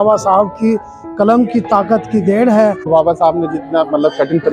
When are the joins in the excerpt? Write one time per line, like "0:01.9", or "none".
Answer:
0:02.8